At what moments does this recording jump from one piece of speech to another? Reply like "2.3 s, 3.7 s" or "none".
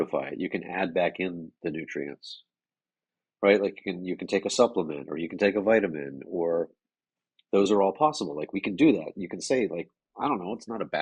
none

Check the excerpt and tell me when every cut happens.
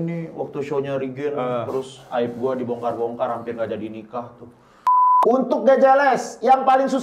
5.1 s

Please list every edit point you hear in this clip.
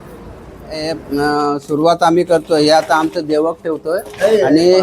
0.9 s

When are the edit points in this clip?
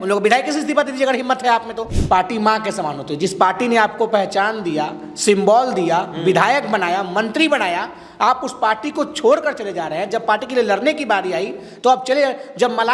1.9 s

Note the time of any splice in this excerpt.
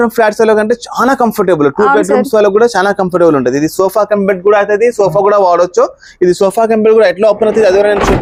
none

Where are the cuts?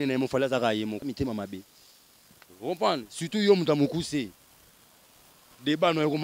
1.0 s

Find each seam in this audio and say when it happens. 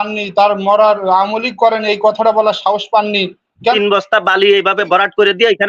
3.8 s

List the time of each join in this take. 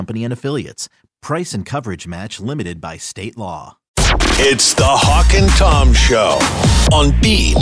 3.9 s

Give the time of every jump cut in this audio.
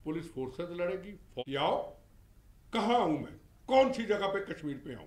1.4 s

